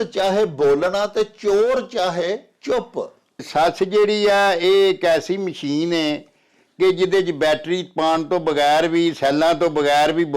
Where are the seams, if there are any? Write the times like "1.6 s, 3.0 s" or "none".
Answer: 3.5 s